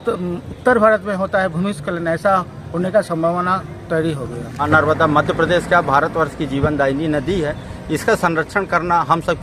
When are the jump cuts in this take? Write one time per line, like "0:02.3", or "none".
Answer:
0:04.7

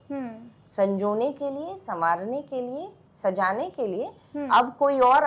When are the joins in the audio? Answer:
none

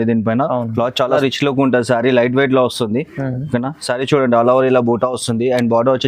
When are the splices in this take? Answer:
0:01.2

